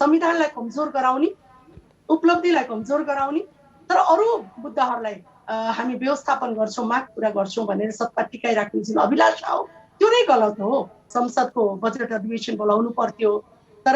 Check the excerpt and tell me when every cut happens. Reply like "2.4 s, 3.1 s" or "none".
11.0 s